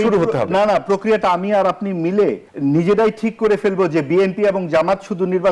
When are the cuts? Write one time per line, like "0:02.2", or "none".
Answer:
0:02.5